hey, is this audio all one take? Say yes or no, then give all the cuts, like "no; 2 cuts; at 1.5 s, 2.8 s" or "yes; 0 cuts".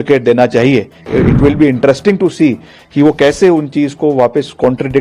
no; 1 cut; at 1.0 s